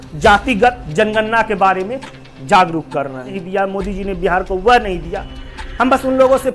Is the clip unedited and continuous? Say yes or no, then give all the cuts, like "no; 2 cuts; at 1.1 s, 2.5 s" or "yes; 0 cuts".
no; 1 cut; at 3.4 s